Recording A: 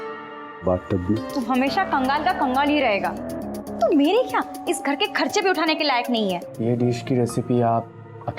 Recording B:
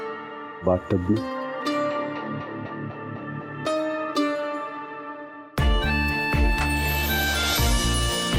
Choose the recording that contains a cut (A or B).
A